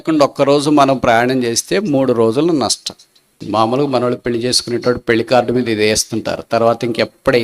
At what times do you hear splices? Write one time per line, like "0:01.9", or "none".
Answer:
0:03.4